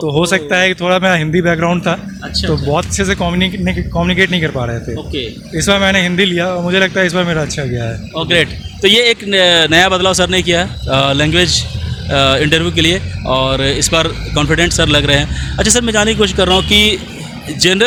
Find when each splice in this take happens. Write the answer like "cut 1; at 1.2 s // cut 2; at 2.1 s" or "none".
none